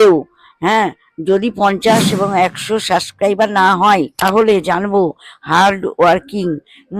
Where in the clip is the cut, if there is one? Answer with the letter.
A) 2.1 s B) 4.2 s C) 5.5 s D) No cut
B